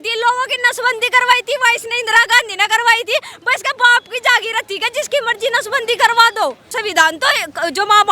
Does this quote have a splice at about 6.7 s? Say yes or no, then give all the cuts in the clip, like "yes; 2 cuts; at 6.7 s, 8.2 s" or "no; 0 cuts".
yes; 1 cut; at 6.7 s